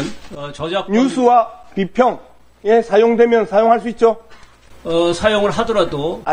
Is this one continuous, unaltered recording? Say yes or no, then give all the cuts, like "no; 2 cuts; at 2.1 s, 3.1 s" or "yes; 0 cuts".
yes; 0 cuts